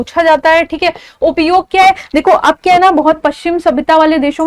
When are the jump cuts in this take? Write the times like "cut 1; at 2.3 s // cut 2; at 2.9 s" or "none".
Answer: none